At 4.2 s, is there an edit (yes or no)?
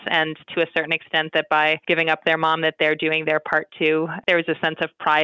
yes